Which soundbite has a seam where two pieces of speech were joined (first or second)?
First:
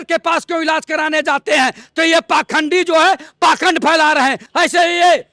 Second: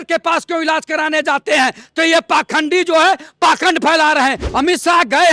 second